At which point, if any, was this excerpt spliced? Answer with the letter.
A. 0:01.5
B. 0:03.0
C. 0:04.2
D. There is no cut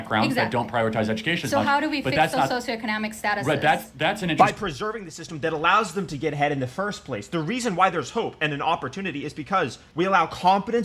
C